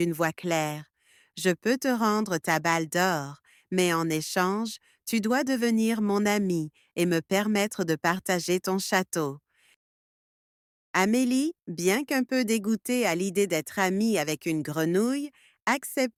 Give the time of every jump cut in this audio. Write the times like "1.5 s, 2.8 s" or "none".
none